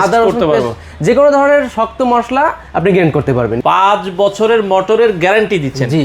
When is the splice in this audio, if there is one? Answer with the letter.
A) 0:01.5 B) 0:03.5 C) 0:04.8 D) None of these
B